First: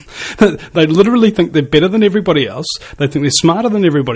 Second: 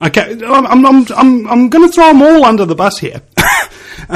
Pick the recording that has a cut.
second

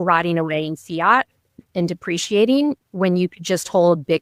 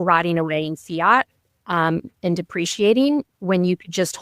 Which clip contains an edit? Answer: first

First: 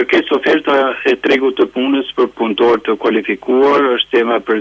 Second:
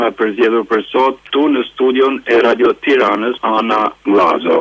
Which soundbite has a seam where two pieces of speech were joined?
second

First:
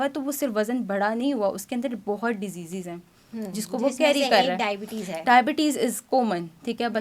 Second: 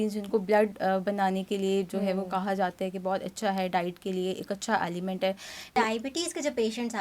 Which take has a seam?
second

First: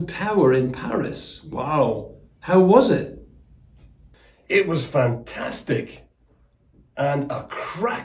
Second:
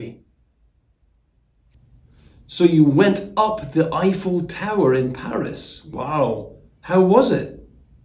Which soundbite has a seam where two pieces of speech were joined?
second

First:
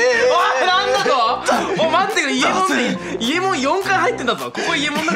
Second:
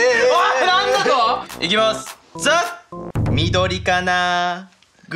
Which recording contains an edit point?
second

